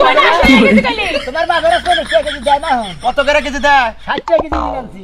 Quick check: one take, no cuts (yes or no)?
yes